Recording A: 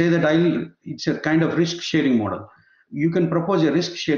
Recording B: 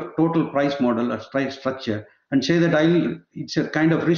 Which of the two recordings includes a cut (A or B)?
A